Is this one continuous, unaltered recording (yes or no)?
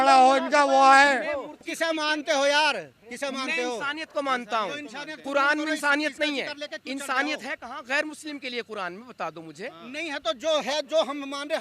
no